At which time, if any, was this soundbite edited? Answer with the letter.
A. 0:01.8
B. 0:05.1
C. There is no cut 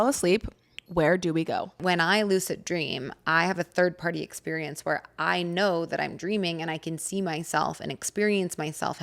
A